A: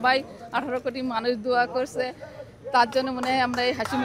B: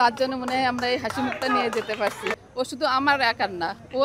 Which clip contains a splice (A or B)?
B